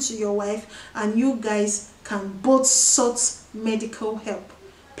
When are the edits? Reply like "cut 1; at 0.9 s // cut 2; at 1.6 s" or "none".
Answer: none